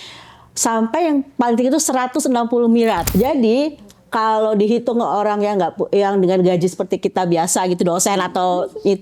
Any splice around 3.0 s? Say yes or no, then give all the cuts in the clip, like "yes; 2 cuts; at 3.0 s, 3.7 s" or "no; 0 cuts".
yes; 1 cut; at 3.0 s